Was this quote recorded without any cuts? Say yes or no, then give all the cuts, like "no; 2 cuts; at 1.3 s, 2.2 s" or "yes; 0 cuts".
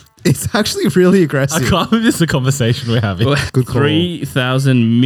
no; 1 cut; at 3.5 s